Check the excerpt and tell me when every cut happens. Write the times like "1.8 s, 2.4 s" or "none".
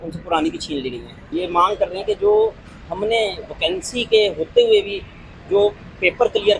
1.3 s